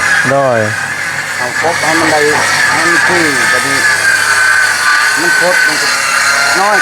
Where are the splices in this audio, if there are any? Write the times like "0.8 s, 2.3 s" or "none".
none